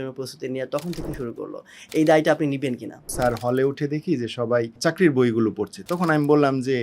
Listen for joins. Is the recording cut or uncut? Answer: cut